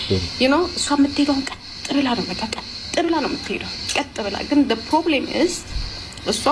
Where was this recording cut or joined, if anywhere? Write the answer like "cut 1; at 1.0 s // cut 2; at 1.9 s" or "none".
none